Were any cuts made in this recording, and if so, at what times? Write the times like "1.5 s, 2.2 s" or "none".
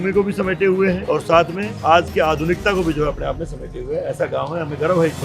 1.0 s, 1.8 s